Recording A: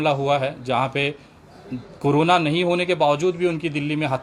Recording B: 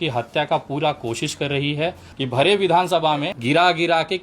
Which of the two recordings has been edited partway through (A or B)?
B